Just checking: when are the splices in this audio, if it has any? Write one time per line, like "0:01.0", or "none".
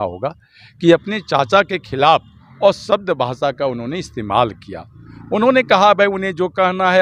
none

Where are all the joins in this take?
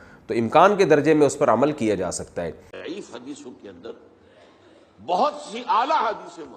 0:02.7

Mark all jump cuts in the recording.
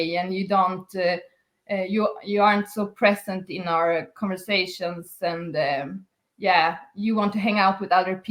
none

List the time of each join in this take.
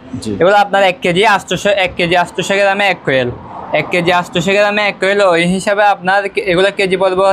none

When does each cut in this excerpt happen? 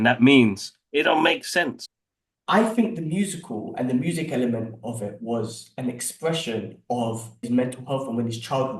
0:01.8
0:07.4

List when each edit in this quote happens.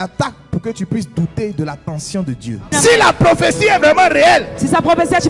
0:02.7

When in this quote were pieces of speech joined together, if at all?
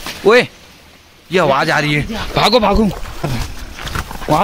0:03.4

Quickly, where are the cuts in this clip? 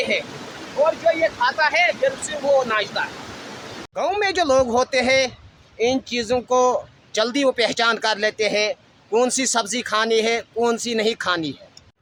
none

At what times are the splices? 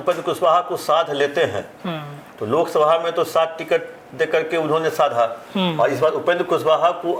none

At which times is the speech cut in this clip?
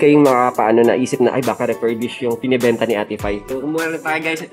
0:03.4

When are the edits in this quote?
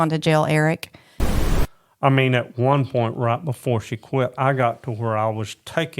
0:01.4

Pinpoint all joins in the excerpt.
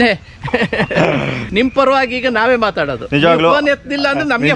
0:01.4

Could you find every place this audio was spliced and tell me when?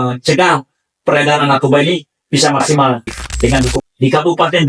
0:03.8

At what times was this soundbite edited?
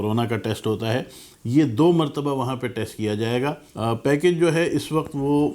0:03.7

